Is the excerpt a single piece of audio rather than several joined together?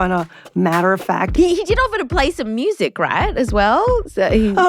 no; 1 cut; at 1.3 s

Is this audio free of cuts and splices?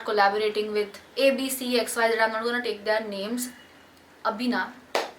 yes; 0 cuts

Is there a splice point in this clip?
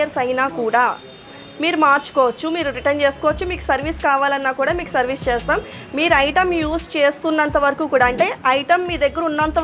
no; 0 cuts

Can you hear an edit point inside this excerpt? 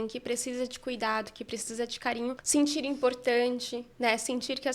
yes; 1 cut; at 2.4 s

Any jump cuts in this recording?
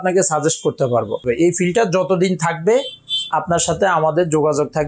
yes; 1 cut; at 1.2 s

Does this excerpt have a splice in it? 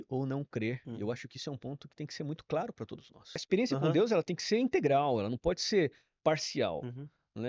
yes; 1 cut; at 3.4 s

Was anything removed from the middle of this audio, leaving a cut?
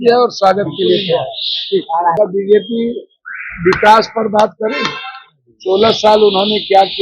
yes; 1 cut; at 2.1 s

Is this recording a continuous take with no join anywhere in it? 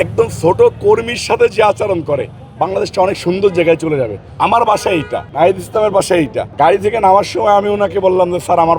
no; 3 cuts; at 4.2 s, 5.2 s, 6.4 s

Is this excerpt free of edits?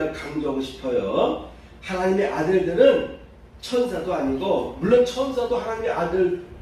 yes; 0 cuts

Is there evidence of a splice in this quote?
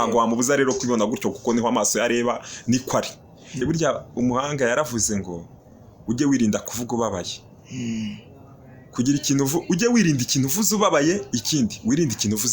yes; 1 cut; at 3.6 s

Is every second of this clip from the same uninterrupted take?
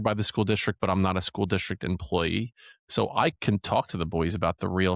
yes; 0 cuts

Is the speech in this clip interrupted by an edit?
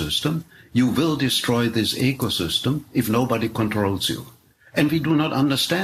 yes; 1 cut; at 4.3 s

